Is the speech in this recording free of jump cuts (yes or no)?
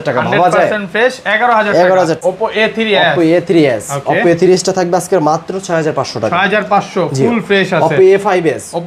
no